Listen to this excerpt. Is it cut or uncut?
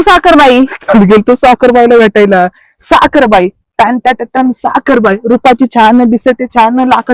uncut